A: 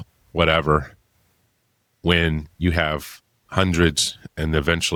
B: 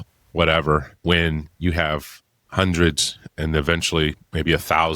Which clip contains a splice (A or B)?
B